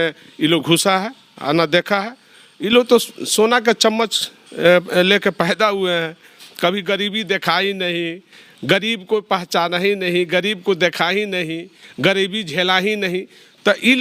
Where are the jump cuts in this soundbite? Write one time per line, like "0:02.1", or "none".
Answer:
none